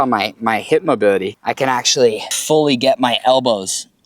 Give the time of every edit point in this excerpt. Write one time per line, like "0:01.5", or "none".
0:01.3
0:02.3